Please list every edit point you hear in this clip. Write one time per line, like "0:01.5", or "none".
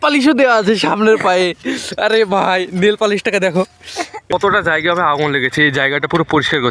0:04.3